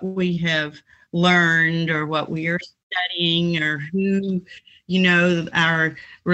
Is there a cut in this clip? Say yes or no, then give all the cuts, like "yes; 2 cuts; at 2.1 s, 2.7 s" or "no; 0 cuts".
no; 0 cuts